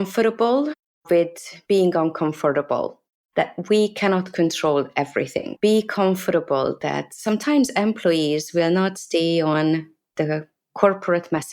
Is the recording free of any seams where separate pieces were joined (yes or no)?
yes